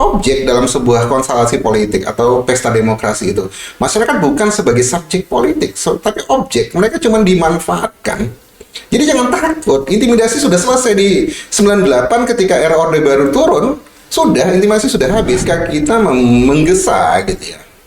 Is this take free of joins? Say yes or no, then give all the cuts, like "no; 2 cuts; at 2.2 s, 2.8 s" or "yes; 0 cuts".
no; 1 cut; at 15.4 s